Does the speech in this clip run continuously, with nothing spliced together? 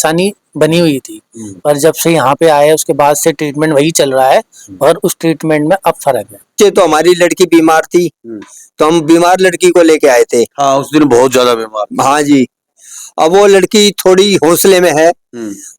no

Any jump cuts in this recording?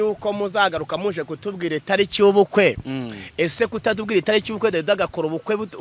no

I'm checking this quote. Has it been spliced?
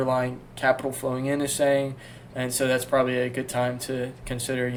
no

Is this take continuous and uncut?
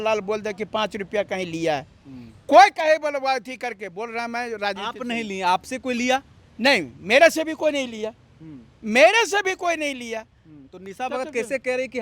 yes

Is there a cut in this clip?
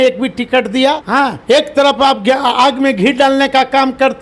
yes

